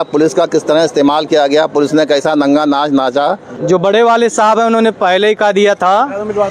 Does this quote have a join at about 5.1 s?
no; 1 cut; at 3.5 s

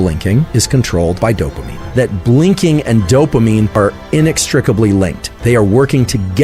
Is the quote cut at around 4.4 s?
no; 0 cuts

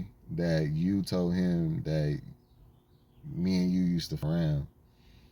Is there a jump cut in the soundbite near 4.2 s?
yes; 1 cut; at 4.2 s

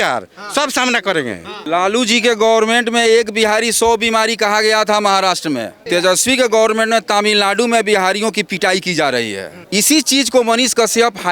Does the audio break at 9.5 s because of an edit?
yes; 3 cuts; at 1.6 s, 5.8 s, 9.5 s

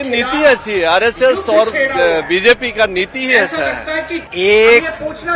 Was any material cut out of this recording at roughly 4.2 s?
yes; 1 cut; at 4.2 s

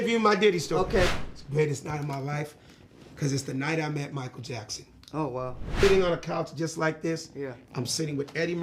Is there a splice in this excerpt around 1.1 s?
yes; 2 cuts; at 1.1 s, 5.8 s

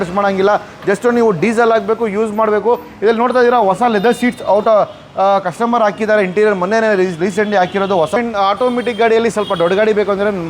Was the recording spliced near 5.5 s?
no; 1 cut; at 8.2 s

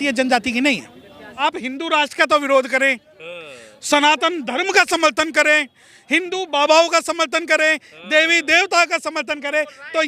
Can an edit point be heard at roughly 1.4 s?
yes; 1 cut; at 1.4 s

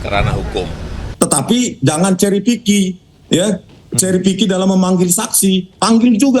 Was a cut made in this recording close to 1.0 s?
yes; 1 cut; at 1.0 s

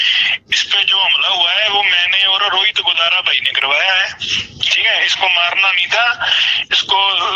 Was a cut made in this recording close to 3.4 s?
no; 1 cut; at 2.0 s

